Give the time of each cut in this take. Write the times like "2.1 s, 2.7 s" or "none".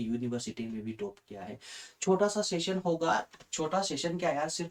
none